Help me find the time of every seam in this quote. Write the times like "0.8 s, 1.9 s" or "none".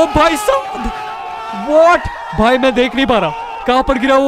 2.2 s